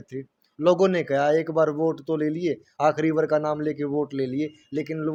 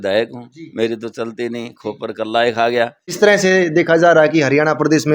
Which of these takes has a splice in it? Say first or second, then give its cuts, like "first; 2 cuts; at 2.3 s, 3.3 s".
second; 1 cut; at 3.0 s